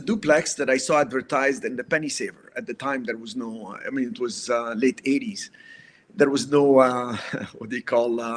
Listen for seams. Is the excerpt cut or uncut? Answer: uncut